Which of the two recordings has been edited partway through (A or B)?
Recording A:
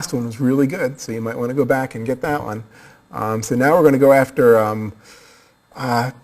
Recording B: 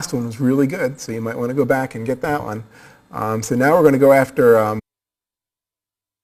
A